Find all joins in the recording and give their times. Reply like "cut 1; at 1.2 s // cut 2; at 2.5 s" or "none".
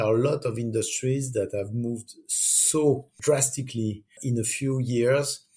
cut 1; at 3.1 s // cut 2; at 4.2 s